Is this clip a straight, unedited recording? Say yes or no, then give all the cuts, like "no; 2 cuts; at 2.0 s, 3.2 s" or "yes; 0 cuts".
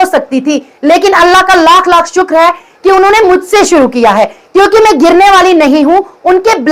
yes; 0 cuts